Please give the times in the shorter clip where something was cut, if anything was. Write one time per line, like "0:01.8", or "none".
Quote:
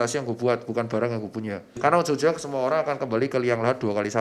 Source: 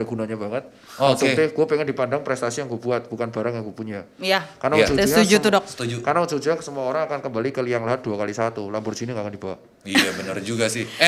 0:01.6